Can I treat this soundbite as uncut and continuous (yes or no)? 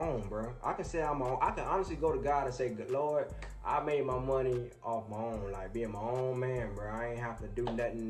yes